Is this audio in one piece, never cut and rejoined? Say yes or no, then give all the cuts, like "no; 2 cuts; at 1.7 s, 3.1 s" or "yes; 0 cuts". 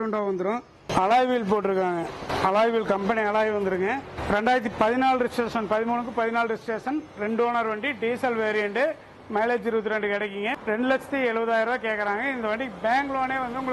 no; 2 cuts; at 0.9 s, 4.1 s